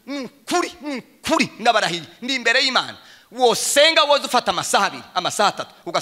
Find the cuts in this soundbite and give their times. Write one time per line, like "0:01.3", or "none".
none